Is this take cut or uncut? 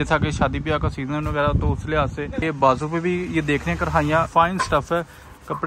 cut